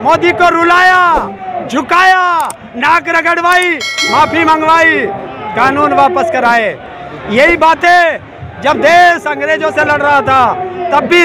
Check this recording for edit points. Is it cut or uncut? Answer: uncut